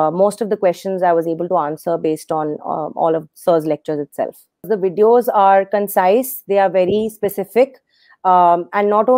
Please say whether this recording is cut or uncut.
cut